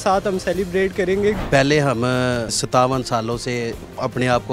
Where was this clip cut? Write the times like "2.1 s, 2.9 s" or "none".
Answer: 1.4 s, 2.6 s